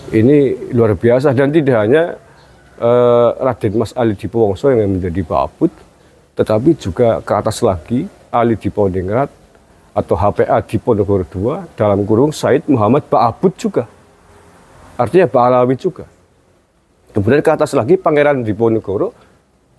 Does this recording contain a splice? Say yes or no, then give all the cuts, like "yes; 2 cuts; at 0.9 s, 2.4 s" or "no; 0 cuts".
no; 0 cuts